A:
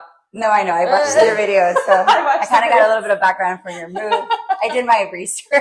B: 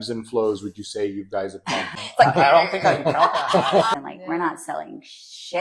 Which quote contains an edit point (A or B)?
B